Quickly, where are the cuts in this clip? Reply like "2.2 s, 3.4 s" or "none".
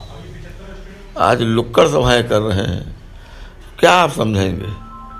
none